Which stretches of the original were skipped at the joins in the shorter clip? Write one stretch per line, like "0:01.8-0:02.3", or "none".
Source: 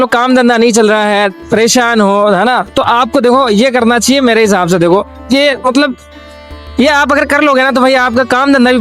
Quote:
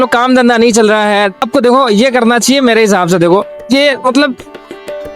0:01.4-0:03.0

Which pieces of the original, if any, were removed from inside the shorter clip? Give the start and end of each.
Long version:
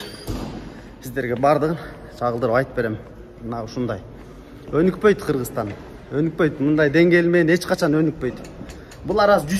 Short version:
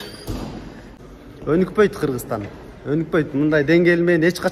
0:00.9-0:04.2

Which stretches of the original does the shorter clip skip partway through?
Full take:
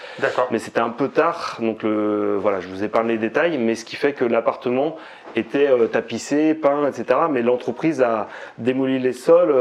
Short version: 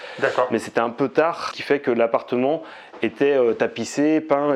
0:01.5-0:03.9

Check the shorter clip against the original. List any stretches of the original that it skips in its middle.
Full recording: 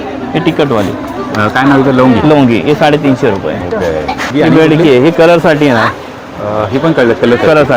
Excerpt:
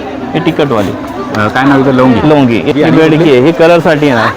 0:02.7-0:04.3

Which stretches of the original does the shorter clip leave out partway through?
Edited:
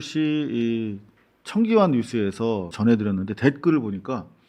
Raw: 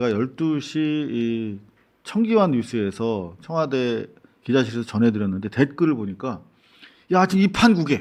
0:03.3-0:04.9

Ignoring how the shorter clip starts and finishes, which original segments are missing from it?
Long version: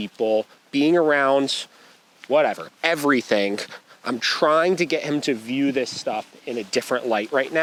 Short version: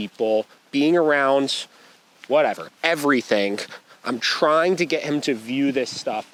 none

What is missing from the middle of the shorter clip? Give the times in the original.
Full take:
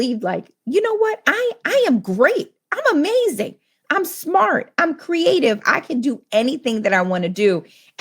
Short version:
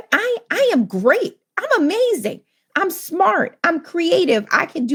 none

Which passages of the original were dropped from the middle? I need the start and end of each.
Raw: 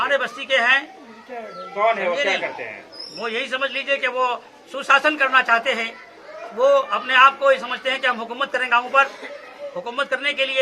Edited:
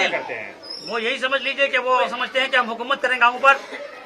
0:04.5-0:07.7

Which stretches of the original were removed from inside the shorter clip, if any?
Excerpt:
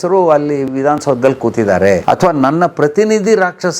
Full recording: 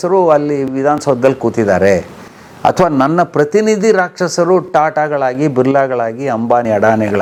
0:02.0-0:02.6

